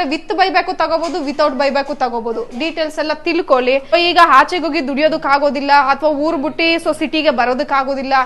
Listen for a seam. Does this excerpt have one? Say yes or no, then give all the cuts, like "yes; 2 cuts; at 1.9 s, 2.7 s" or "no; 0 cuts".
yes; 1 cut; at 3.9 s